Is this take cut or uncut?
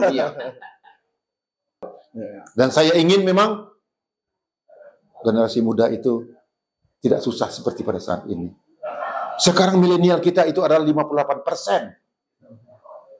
cut